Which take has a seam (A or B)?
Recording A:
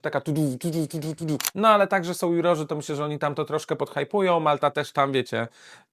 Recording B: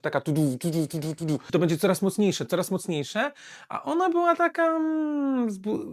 A